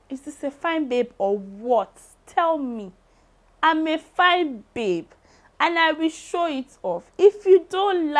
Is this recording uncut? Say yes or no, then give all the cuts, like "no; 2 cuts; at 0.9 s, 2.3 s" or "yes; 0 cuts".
yes; 0 cuts